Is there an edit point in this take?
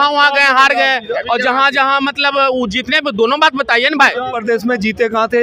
yes; 1 cut; at 4.3 s

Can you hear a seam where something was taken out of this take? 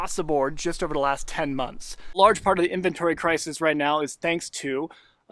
yes; 1 cut; at 2.2 s

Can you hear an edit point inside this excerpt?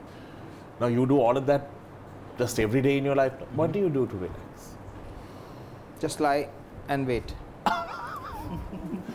no; 0 cuts

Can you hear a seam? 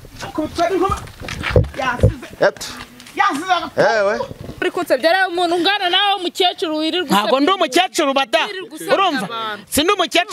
yes; 1 cut; at 4.6 s

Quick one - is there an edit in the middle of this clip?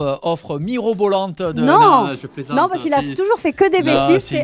no; 0 cuts

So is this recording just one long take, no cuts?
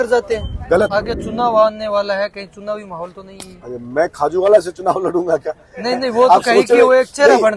no; 1 cut; at 0.9 s

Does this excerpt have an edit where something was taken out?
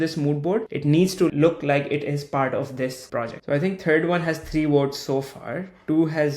yes; 2 cuts; at 1.1 s, 3.3 s

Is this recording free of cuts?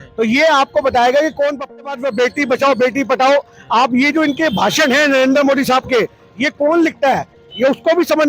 no; 1 cut; at 1.7 s

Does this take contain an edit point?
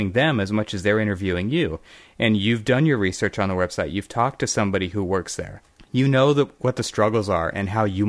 no; 0 cuts

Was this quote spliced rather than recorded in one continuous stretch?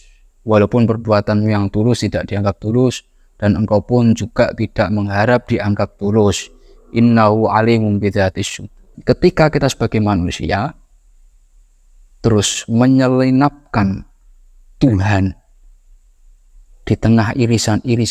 yes; 1 cut; at 8.9 s

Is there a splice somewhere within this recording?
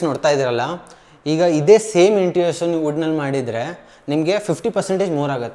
no; 0 cuts

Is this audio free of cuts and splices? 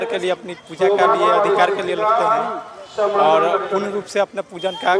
yes; 0 cuts

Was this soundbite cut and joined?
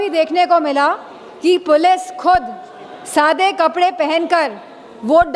no; 0 cuts

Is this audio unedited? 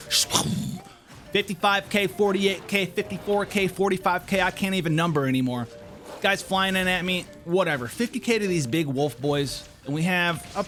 yes; 0 cuts

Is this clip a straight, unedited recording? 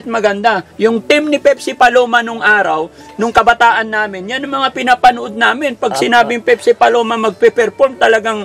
yes; 0 cuts

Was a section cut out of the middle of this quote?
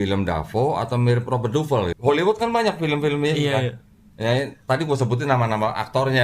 yes; 1 cut; at 1.9 s

